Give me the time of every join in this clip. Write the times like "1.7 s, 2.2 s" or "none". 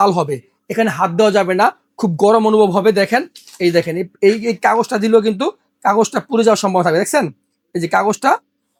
none